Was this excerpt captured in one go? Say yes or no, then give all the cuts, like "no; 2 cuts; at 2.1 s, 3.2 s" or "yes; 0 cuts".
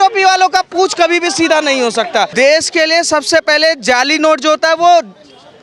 no; 1 cut; at 2.3 s